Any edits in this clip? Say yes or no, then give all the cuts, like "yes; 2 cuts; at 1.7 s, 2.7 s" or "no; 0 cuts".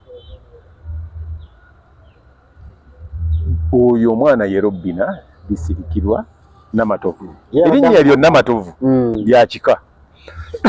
no; 0 cuts